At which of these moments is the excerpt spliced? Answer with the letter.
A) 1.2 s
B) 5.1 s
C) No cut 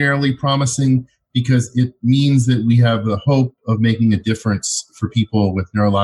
C